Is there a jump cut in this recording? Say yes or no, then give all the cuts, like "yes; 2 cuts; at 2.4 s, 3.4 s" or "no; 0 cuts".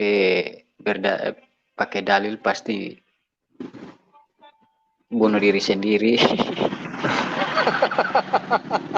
no; 0 cuts